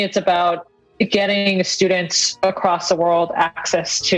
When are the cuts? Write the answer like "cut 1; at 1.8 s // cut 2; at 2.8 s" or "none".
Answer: none